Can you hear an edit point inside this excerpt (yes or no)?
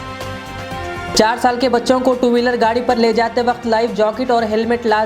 yes